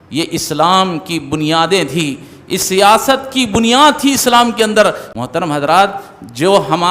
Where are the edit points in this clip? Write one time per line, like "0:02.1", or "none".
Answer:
0:05.1

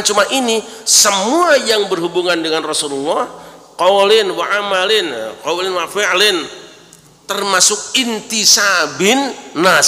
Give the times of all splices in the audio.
none

